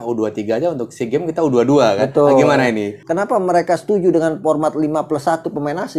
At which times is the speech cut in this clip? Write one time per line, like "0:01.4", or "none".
0:03.0